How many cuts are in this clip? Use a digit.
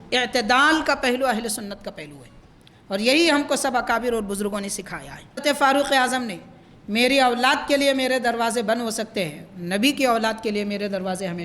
1